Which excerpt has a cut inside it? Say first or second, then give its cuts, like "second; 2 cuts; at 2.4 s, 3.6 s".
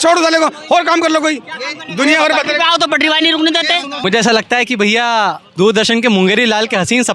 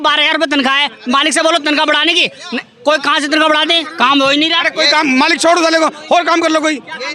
first; 1 cut; at 3.9 s